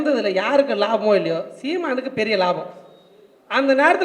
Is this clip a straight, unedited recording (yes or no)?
yes